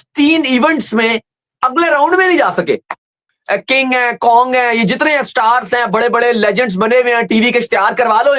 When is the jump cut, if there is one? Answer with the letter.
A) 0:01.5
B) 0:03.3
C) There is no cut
B